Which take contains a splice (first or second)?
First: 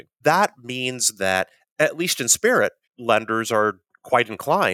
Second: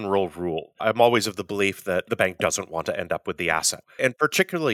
second